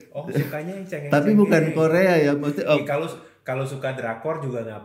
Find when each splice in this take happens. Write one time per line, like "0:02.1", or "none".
0:02.9